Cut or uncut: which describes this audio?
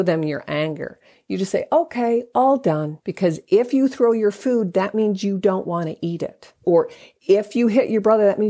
cut